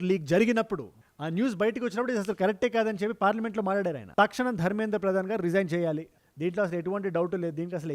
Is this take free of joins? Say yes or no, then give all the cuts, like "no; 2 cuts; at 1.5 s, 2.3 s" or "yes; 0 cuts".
no; 1 cut; at 4.1 s